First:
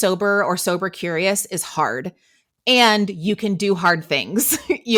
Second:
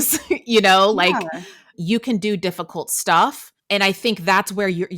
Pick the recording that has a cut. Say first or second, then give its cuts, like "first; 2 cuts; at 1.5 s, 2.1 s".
second; 2 cuts; at 1.7 s, 3.5 s